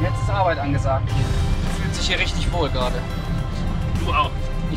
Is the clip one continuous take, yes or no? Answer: no